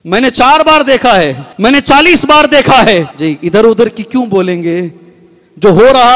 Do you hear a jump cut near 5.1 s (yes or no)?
no